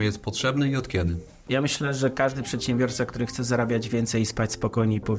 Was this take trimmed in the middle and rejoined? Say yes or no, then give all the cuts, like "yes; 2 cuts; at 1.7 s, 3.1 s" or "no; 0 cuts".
no; 0 cuts